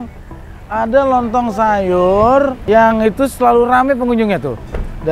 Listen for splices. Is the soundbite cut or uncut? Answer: cut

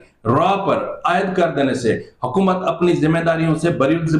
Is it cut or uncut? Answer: uncut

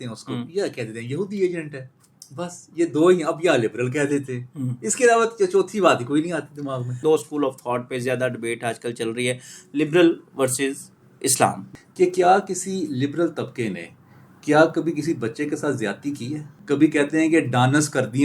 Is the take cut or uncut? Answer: cut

